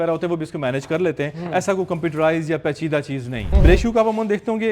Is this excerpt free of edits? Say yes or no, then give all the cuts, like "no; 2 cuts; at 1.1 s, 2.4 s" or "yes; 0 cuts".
no; 1 cut; at 3.4 s